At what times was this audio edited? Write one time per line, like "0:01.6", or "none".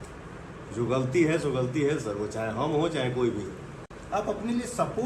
none